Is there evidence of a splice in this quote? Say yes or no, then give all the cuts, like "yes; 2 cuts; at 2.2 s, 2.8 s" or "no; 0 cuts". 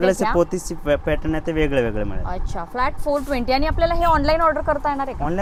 no; 0 cuts